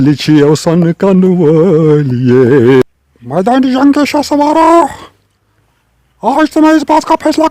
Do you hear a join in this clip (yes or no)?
yes